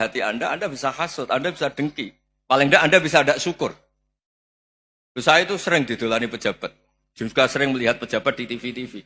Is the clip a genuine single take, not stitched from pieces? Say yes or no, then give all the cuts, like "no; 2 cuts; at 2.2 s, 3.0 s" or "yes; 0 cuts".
yes; 0 cuts